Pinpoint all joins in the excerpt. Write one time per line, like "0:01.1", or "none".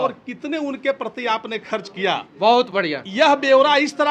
none